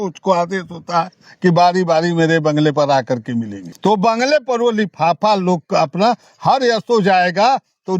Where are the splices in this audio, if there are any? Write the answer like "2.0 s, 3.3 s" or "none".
3.6 s